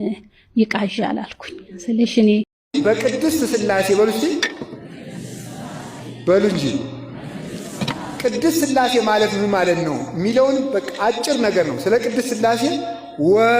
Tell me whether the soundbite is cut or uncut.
cut